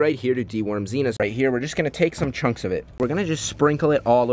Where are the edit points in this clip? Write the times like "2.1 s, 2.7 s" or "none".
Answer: 1.2 s, 3.0 s